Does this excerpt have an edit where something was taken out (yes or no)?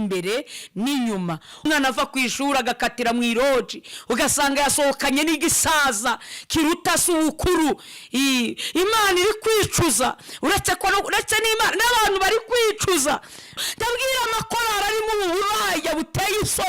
yes